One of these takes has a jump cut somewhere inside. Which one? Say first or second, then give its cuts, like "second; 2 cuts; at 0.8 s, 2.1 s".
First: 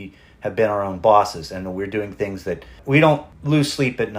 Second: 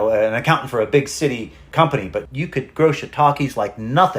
second; 1 cut; at 1.7 s